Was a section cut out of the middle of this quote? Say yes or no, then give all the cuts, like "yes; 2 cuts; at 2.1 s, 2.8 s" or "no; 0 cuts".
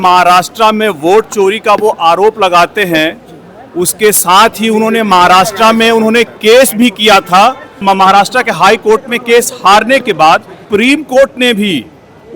yes; 2 cuts; at 7.7 s, 10.6 s